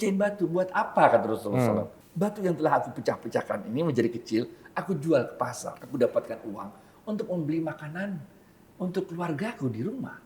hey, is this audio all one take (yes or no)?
no